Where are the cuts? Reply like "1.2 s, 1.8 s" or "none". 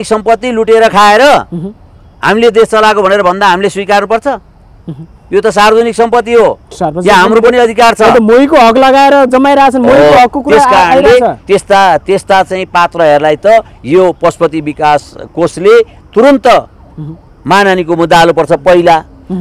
none